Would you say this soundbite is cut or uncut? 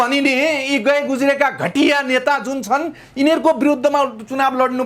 uncut